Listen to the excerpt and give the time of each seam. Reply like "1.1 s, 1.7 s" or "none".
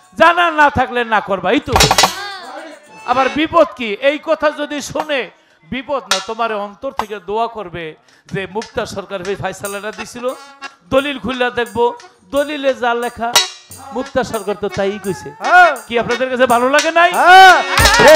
none